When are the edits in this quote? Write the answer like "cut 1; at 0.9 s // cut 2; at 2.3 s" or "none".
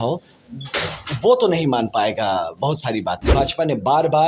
cut 1; at 3.2 s